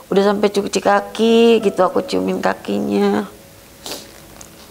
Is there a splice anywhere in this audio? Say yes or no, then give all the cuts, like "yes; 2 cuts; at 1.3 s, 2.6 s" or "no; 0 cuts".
no; 0 cuts